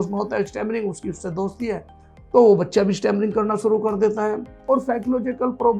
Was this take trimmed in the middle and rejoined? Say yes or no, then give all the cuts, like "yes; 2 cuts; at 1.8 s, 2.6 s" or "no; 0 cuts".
yes; 1 cut; at 4.5 s